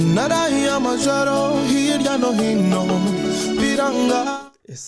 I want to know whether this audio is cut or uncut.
uncut